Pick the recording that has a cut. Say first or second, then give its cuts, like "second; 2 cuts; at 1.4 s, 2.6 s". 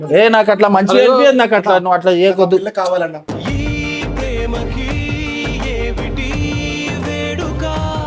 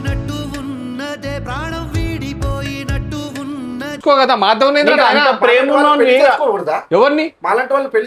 second; 1 cut; at 4.0 s